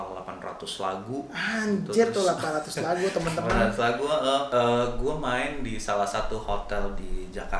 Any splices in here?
yes; 1 cut; at 4.5 s

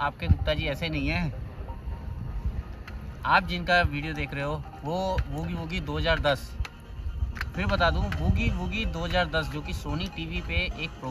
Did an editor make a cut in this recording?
no; 0 cuts

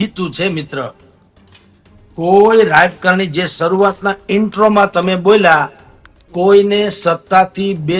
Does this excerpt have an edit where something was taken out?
no; 0 cuts

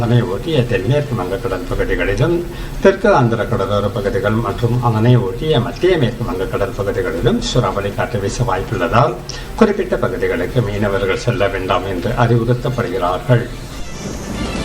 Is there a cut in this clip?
yes; 1 cut; at 13.7 s

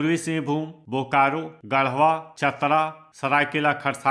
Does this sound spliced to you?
no; 0 cuts

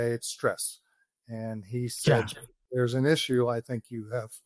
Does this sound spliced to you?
no; 0 cuts

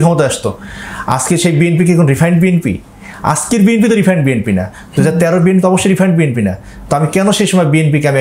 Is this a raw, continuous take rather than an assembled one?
yes; 0 cuts

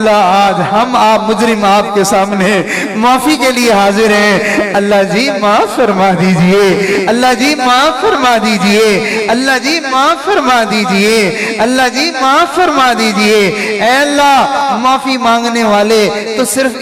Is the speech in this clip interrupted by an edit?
no; 0 cuts

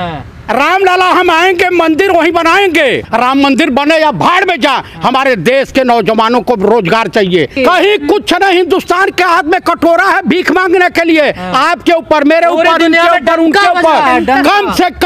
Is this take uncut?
no; 2 cuts; at 3.0 s, 7.5 s

